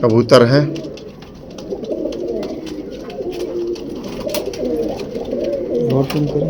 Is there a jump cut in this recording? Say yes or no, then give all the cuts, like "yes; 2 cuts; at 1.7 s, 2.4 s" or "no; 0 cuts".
no; 0 cuts